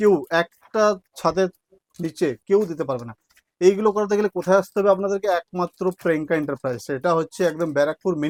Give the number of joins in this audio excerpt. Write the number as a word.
zero